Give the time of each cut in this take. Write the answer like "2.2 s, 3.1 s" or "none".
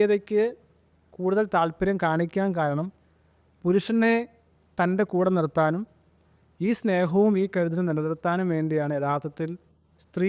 none

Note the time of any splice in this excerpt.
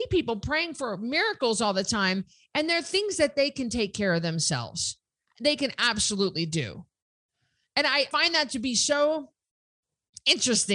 5.2 s, 8.1 s

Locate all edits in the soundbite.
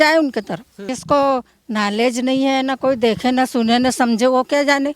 0.9 s

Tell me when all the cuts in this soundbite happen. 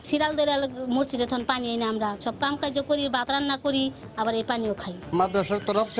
2.2 s, 5.0 s

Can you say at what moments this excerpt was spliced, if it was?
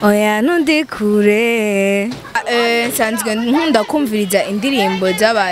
2.4 s

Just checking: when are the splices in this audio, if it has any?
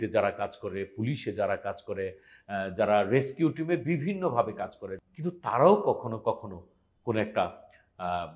4.9 s

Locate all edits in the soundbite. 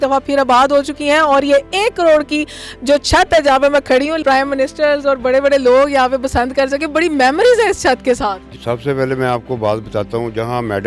4.2 s, 8.5 s

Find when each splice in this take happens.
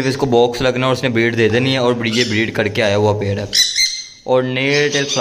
none

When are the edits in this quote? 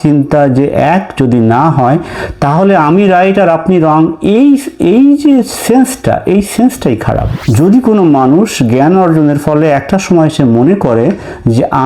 7.4 s

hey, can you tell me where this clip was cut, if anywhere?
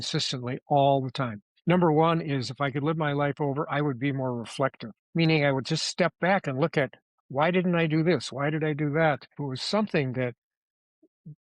9.4 s

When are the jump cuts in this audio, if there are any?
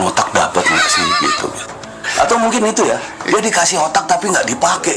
none

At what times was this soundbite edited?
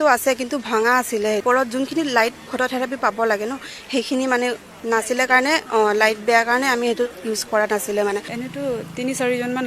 1.4 s, 8.4 s

